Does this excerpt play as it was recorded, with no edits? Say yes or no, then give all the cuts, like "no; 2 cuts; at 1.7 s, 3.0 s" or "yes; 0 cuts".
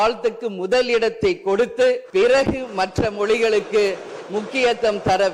no; 1 cut; at 2.0 s